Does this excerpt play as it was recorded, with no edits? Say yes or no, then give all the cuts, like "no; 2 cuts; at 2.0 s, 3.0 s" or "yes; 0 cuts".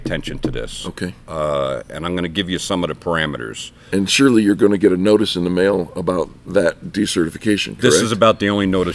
no; 1 cut; at 3.8 s